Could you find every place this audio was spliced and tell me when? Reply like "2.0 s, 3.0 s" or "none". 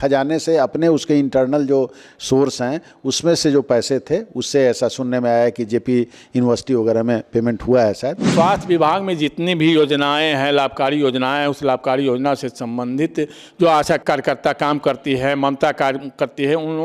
8.3 s, 14.0 s